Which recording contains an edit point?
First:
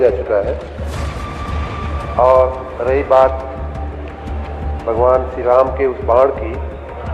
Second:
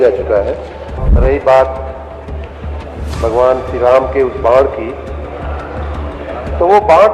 second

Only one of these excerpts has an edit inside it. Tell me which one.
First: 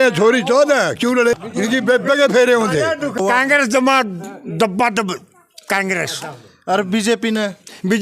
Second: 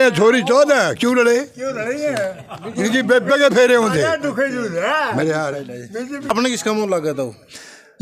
first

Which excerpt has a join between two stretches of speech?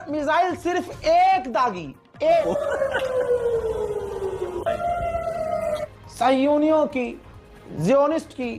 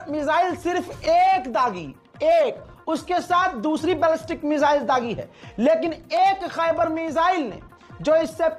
first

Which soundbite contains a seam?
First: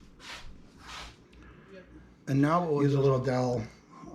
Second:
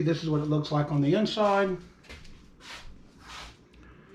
first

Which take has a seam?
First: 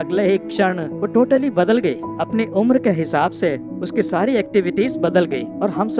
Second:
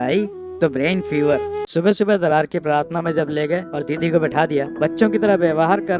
second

